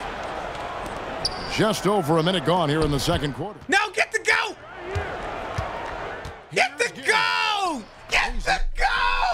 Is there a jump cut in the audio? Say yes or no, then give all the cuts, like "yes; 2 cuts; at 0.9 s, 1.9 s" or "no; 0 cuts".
no; 0 cuts